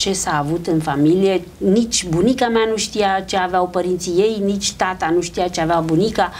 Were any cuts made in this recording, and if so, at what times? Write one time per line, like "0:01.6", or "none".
0:01.5